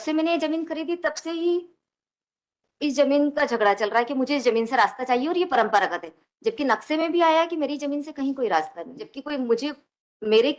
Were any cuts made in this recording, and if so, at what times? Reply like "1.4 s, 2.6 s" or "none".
9.2 s